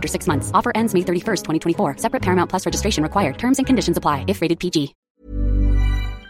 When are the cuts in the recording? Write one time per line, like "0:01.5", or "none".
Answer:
0:05.0